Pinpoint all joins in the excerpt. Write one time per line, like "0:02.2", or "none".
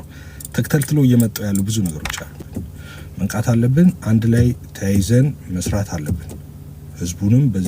0:02.4